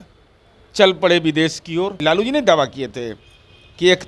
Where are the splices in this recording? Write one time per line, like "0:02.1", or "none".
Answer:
0:02.0